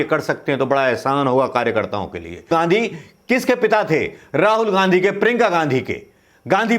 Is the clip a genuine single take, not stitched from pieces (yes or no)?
no